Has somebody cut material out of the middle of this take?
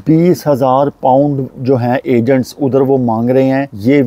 no; 0 cuts

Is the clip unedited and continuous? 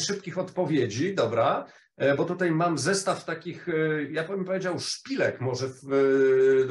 yes; 0 cuts

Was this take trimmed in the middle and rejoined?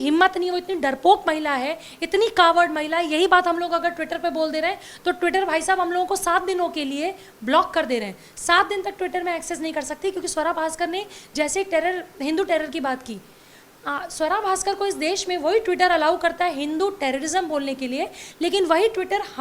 no; 0 cuts

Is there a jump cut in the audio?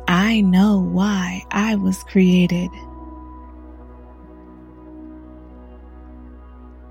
yes; 1 cut; at 3.0 s

